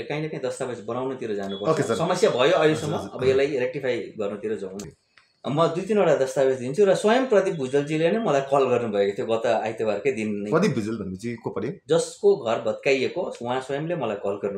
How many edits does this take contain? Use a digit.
1